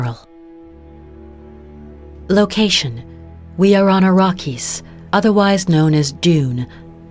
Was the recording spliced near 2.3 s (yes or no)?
yes